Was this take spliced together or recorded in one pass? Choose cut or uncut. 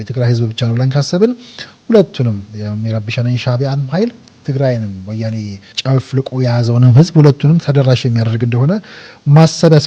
cut